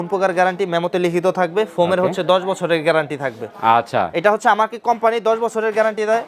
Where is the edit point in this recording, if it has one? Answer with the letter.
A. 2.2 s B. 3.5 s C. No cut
C